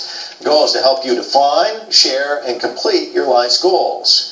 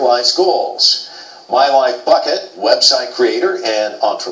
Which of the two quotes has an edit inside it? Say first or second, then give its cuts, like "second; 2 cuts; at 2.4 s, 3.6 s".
first; 1 cut; at 1.7 s